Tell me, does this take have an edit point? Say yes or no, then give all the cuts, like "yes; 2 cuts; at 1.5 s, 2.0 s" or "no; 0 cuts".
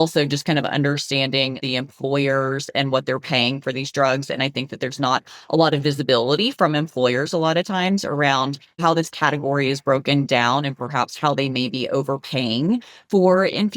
yes; 2 cuts; at 1.6 s, 8.8 s